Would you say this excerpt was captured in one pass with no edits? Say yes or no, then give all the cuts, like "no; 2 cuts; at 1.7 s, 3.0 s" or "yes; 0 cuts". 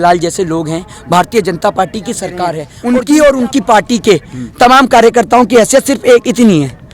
no; 1 cut; at 2.7 s